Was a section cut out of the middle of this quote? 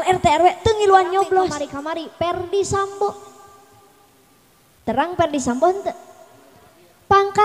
yes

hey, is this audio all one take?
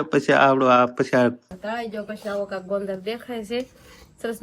no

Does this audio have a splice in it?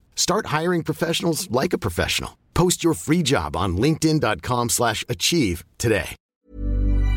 yes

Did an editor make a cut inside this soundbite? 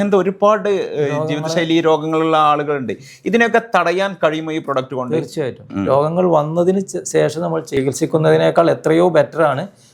yes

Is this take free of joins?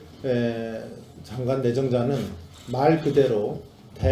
yes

